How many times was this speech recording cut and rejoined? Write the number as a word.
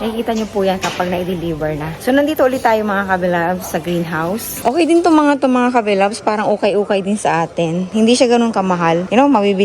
one